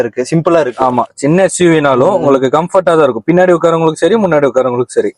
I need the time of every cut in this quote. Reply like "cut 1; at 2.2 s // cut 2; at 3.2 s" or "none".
none